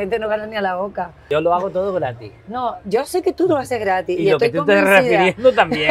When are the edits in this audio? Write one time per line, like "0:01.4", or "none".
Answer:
0:01.2